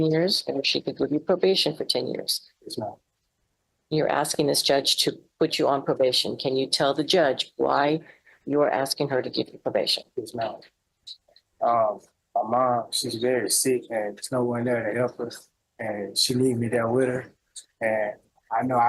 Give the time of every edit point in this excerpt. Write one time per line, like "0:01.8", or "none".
none